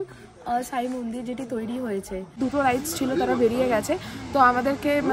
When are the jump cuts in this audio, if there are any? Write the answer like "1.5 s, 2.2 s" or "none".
2.4 s